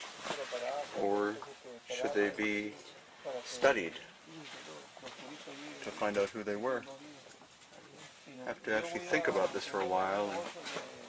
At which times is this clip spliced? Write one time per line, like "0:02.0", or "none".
none